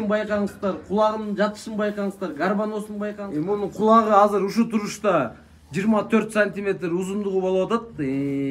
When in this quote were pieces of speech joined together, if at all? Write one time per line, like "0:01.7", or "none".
0:03.2